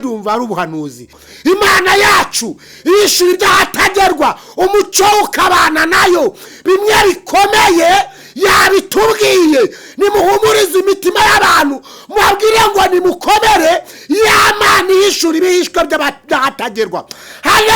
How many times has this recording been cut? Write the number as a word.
one